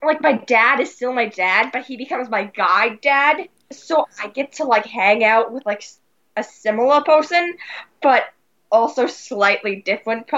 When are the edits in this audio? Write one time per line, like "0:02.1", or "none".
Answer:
0:03.7